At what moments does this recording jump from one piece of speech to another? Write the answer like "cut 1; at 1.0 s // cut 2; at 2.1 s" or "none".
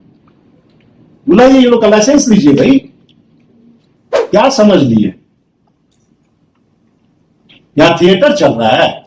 cut 1; at 4.2 s